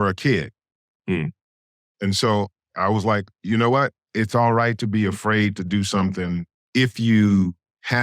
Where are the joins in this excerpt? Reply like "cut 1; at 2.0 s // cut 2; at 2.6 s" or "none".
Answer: cut 1; at 6.6 s